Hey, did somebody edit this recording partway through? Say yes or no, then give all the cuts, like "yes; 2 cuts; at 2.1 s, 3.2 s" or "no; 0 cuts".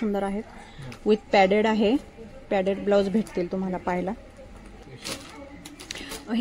yes; 1 cut; at 4.8 s